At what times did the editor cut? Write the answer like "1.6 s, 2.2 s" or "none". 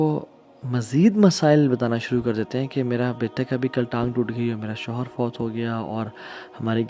none